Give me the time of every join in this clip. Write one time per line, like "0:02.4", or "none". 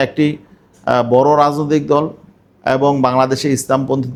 none